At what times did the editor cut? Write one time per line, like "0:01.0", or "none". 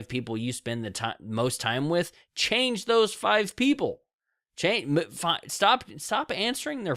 none